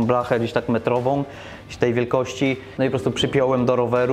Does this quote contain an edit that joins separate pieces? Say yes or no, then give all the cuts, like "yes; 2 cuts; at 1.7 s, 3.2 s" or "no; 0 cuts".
yes; 1 cut; at 2.7 s